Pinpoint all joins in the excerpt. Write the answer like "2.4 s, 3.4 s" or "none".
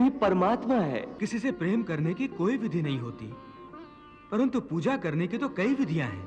1.2 s